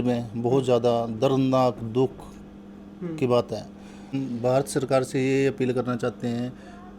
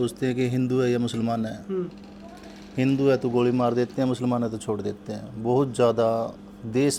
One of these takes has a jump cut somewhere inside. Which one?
first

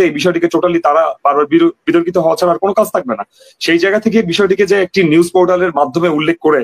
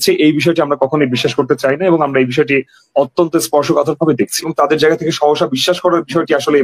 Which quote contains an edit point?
second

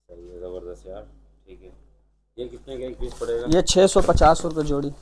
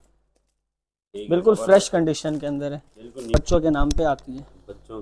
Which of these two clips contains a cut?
second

